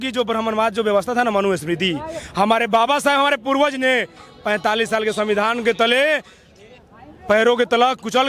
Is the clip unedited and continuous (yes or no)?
yes